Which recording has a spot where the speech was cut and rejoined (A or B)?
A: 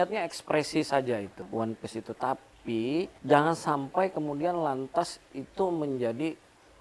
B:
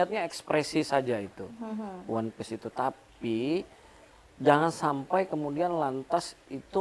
A